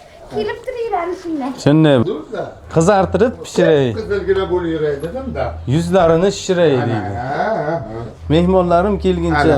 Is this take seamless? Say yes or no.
no